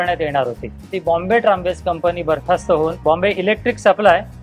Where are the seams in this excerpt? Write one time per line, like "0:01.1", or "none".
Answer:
0:00.9
0:03.0